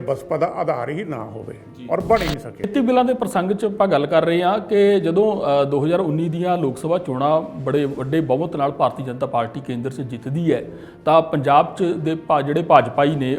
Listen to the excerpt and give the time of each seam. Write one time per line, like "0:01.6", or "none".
0:02.7